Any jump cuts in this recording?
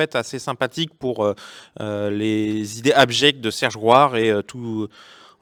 no; 0 cuts

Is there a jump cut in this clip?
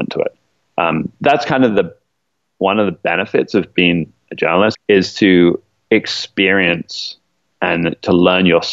yes; 1 cut; at 4.7 s

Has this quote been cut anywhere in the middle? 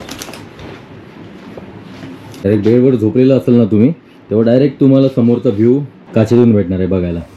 yes; 2 cuts; at 2.4 s, 6.0 s

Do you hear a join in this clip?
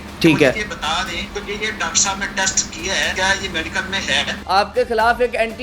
yes; 3 cuts; at 1.3 s, 3.1 s, 4.4 s

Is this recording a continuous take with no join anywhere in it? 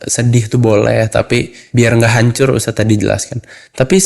no; 1 cut; at 1.6 s

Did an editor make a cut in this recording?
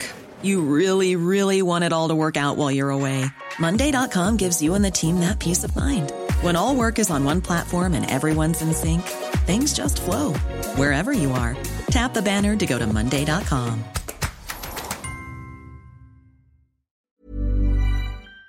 yes; 1 cut; at 17.2 s

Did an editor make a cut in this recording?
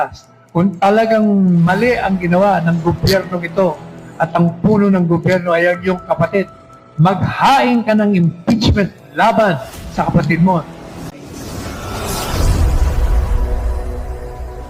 no; 0 cuts

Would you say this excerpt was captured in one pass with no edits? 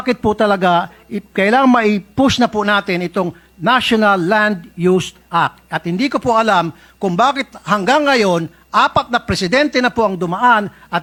yes; 0 cuts

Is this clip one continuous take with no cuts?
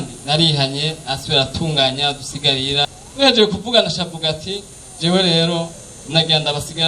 no; 1 cut; at 2.9 s

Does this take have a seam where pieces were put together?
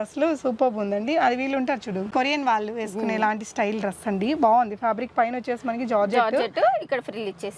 no; 0 cuts

